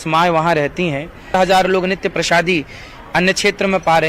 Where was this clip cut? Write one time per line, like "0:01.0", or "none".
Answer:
0:01.3